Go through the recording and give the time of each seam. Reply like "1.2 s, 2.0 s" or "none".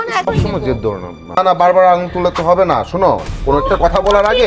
1.4 s